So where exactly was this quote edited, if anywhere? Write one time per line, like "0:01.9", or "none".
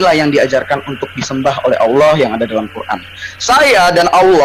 none